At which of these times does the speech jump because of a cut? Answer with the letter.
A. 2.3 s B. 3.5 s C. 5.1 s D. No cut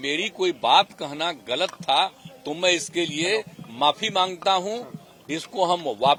D